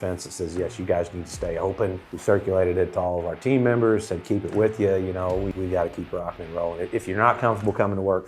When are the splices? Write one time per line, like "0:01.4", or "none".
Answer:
0:02.1
0:05.5